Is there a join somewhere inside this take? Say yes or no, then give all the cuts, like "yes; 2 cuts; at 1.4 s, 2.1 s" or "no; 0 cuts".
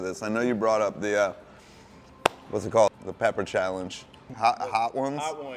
no; 0 cuts